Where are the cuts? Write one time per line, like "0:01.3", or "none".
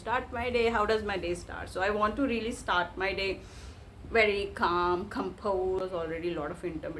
0:05.8